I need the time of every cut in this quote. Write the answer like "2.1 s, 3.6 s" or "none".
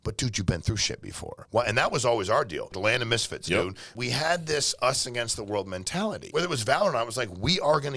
1.4 s, 2.7 s, 3.9 s, 6.2 s